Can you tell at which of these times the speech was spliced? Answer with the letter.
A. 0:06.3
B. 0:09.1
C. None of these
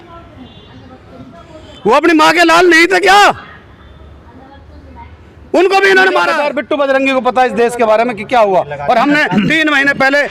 A